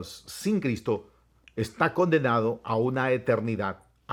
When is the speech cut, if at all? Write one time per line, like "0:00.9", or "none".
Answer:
none